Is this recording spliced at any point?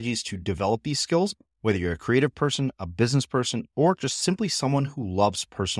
no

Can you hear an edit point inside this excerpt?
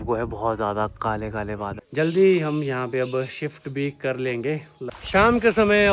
yes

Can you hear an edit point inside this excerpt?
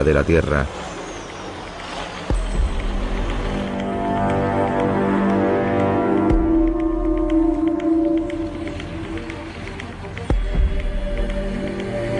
yes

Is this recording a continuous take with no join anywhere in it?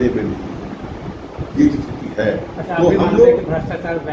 yes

